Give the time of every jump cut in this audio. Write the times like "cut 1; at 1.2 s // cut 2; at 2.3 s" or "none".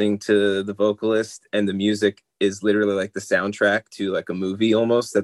none